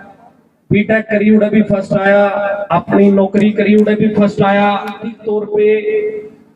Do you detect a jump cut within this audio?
yes; 2 cuts; at 2.6 s, 5.1 s

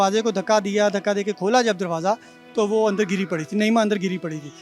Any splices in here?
no; 0 cuts

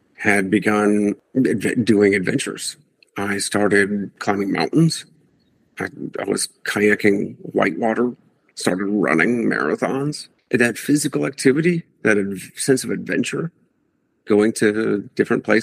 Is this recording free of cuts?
no; 3 cuts; at 1.2 s, 4.2 s, 10.3 s

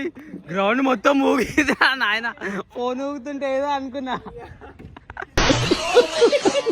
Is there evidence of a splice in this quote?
no; 0 cuts

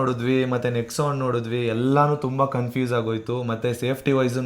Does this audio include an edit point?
no; 0 cuts

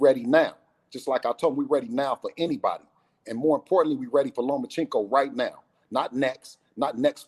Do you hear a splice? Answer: no; 0 cuts

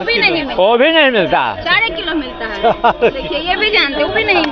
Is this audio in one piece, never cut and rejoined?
yes; 0 cuts

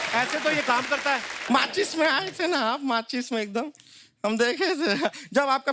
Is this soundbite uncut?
no; 1 cut; at 1.4 s

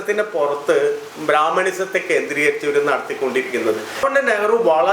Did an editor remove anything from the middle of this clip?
yes; 1 cut; at 4.0 s

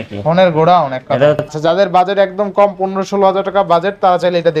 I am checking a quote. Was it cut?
yes; 1 cut; at 1.5 s

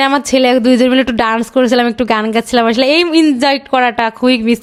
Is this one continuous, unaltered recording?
yes; 0 cuts

